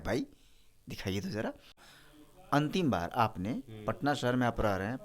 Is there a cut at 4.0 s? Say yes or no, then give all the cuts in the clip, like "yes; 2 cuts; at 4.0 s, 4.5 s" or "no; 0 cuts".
no; 1 cut; at 1.7 s